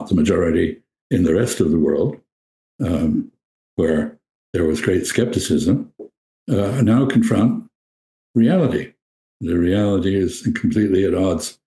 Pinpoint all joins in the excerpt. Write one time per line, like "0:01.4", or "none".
none